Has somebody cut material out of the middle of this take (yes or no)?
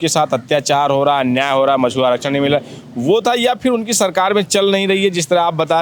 no